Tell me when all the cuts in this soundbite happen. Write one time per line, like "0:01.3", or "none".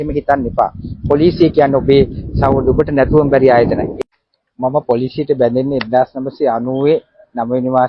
0:03.9